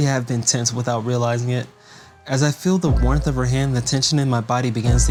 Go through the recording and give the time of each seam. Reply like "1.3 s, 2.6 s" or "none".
none

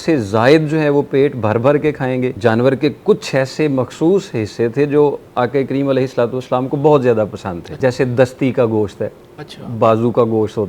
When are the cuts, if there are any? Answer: 2.3 s, 7.6 s

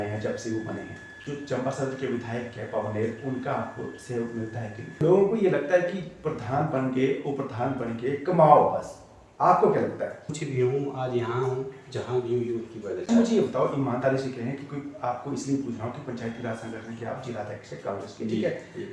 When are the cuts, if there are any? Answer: 1.1 s, 5.0 s, 10.3 s, 13.0 s

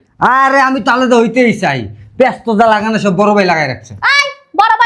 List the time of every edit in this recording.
none

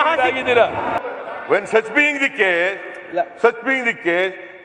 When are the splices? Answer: 1.0 s

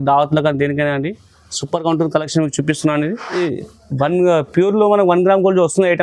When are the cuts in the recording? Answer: 3.4 s

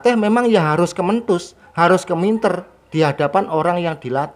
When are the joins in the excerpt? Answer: none

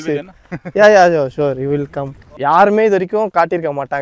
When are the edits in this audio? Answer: 2.3 s

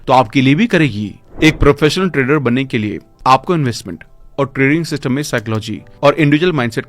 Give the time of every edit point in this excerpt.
1.2 s

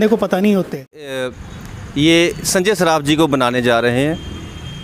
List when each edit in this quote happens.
1.2 s

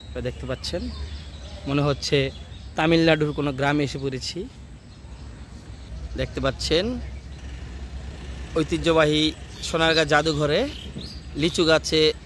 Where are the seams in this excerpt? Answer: 5.9 s

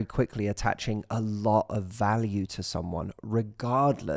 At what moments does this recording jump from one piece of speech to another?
none

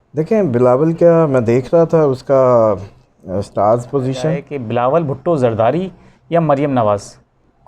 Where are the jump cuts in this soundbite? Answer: 4.5 s

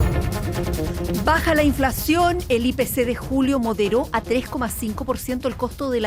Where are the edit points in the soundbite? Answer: 1.3 s

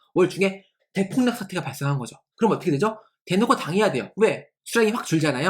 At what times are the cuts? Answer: 4.5 s

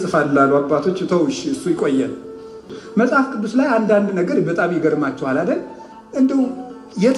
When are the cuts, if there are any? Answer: 2.8 s

